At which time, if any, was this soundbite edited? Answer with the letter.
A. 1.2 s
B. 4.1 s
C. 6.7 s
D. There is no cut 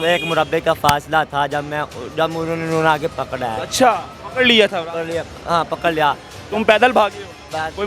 D